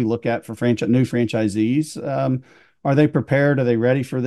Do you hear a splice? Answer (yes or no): no